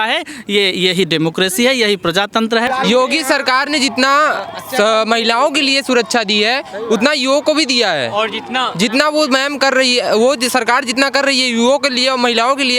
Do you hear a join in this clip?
yes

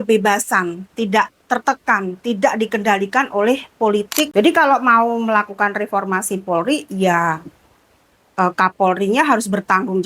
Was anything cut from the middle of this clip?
yes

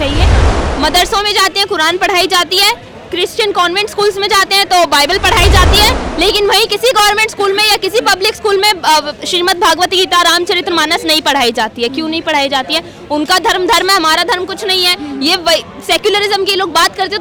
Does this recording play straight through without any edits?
yes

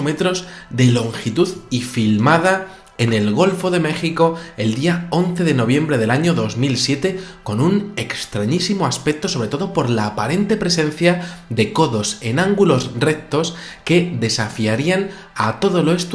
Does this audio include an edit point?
no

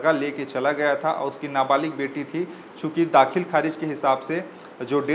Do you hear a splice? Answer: no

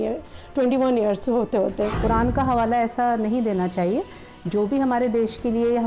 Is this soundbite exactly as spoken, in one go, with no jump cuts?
no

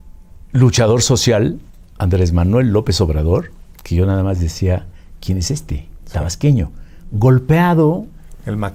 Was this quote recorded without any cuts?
yes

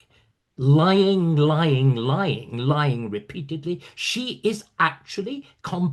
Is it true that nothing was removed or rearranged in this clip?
yes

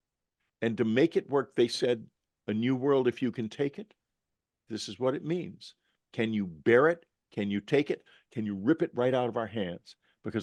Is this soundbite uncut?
yes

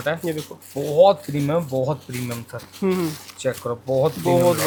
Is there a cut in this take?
no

